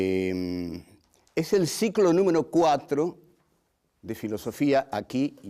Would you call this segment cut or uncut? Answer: uncut